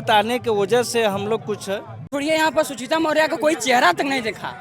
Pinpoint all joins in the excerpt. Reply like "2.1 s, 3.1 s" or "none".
2.1 s